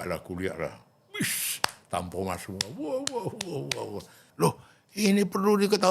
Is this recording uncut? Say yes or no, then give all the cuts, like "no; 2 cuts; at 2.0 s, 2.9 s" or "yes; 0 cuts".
no; 1 cut; at 4.2 s